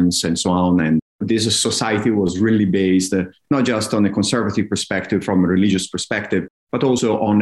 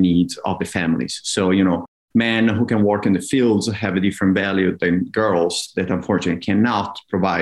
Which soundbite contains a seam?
first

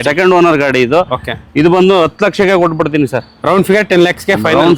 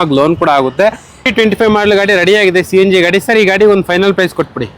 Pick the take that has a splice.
second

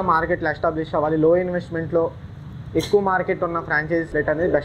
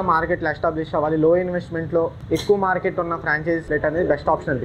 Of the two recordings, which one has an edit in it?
second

